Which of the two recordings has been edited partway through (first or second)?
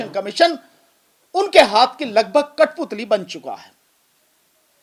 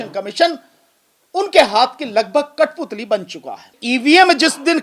second